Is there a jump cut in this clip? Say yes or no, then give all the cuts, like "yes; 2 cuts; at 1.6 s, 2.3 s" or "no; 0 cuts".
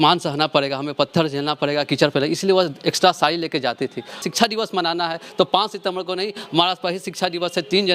yes; 1 cut; at 4.3 s